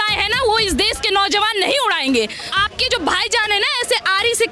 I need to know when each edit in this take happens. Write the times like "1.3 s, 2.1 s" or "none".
2.5 s